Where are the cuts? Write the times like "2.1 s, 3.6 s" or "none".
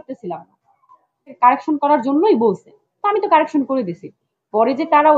1.3 s